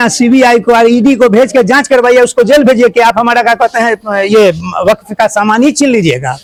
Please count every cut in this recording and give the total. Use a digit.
0